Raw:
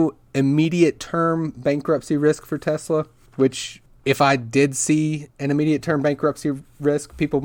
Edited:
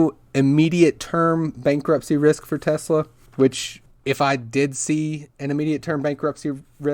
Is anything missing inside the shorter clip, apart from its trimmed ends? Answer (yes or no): no